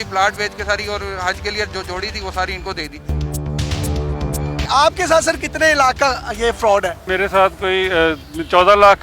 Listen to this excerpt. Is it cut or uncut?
uncut